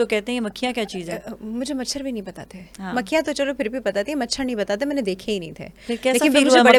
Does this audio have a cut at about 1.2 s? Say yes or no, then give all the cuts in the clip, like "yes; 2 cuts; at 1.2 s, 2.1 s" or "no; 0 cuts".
no; 0 cuts